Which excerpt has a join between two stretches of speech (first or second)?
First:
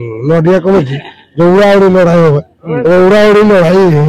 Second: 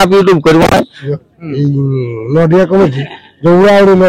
second